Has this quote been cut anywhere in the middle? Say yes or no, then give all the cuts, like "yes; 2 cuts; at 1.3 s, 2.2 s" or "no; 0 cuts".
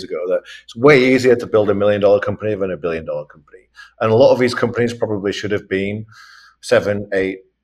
no; 0 cuts